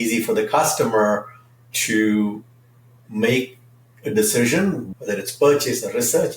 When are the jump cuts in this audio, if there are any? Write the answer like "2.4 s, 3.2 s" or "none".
4.9 s